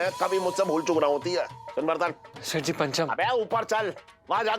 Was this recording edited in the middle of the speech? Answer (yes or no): yes